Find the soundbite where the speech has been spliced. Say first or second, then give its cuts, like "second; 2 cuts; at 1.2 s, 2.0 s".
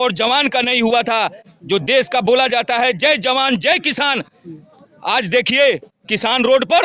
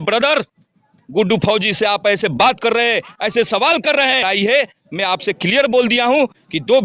second; 1 cut; at 4.2 s